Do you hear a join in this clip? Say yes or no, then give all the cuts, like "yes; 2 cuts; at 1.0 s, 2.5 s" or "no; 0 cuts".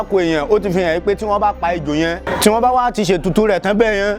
yes; 1 cut; at 2.3 s